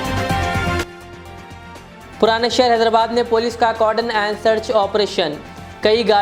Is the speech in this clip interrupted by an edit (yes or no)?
yes